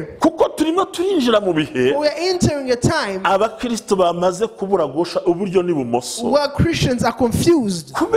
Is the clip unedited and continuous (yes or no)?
yes